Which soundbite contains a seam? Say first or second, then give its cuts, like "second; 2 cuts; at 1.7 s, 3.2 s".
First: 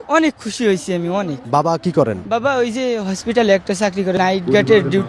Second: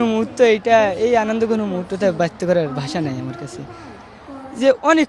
first; 3 cuts; at 1.4 s, 2.2 s, 4.2 s